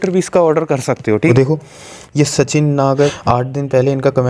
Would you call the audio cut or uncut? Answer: cut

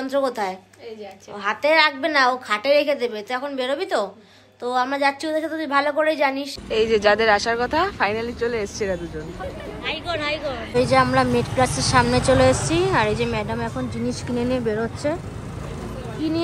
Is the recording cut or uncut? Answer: cut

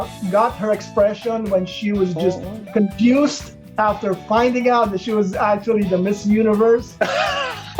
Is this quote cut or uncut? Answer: uncut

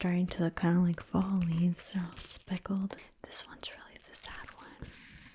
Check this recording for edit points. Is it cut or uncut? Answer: cut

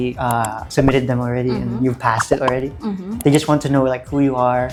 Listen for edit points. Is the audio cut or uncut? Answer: uncut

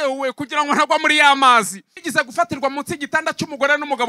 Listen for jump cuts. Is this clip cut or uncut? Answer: cut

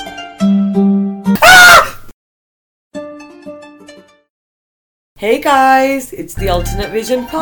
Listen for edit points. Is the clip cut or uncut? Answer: cut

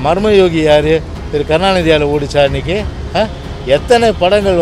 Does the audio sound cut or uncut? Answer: uncut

